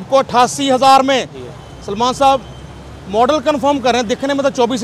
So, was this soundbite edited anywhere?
no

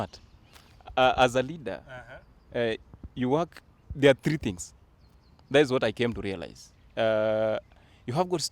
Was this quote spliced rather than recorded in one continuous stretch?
no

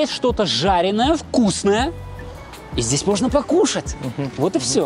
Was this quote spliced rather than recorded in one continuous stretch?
no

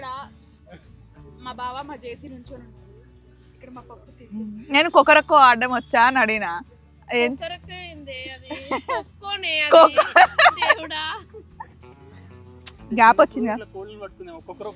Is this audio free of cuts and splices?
yes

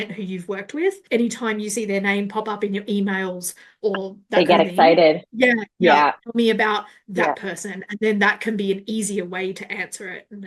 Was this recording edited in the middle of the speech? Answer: yes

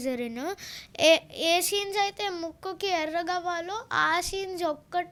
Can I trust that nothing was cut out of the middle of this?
yes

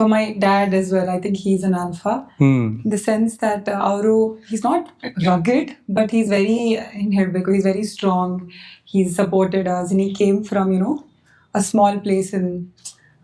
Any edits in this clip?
no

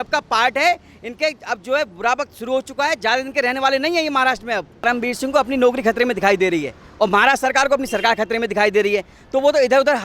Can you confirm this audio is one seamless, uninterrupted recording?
no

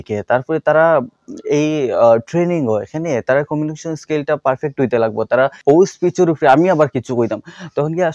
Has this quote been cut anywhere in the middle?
yes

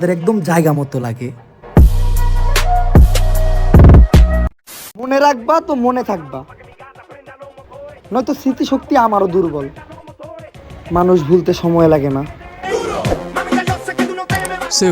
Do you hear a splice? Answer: no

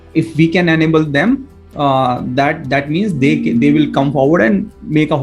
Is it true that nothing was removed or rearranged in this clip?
yes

